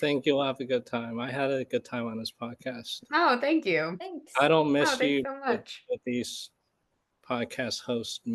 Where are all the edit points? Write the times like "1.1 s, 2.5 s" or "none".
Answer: 2.9 s